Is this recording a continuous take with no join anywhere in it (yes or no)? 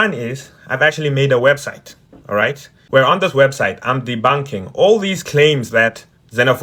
yes